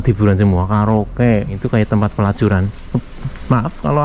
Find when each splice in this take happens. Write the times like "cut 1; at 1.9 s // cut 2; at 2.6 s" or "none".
cut 1; at 1.6 s